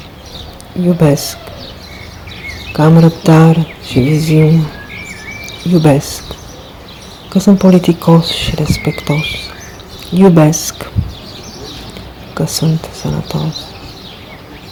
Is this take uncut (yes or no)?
yes